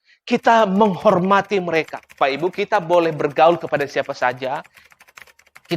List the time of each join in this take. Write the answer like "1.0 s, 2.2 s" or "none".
2.2 s